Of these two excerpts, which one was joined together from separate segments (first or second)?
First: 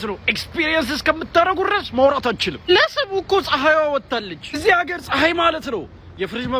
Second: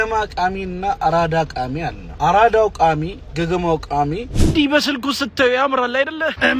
second